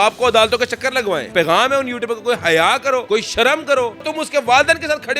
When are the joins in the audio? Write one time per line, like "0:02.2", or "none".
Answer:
0:01.3
0:03.0
0:04.1

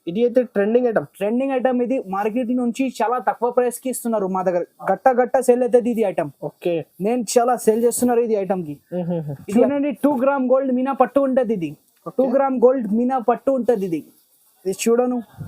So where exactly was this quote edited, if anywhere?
0:09.3

